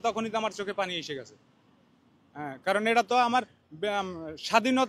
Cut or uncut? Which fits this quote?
uncut